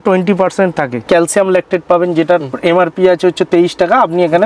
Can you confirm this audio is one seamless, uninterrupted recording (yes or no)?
no